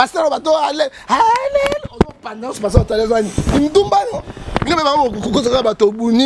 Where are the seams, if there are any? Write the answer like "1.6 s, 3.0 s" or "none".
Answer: none